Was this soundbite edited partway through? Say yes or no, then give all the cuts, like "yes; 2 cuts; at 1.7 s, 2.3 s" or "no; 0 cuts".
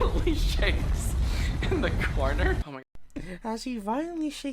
yes; 1 cut; at 2.7 s